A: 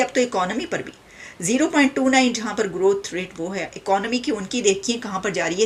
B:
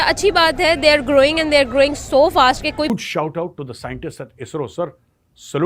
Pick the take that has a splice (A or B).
B